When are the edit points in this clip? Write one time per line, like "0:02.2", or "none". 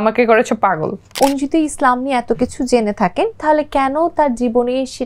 0:01.0